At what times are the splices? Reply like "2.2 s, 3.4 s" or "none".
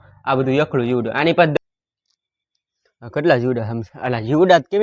1.6 s